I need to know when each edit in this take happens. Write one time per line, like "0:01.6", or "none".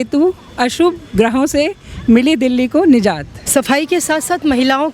0:03.3